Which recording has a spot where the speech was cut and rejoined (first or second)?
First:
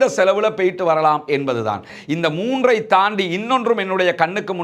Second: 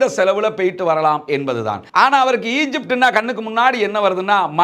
first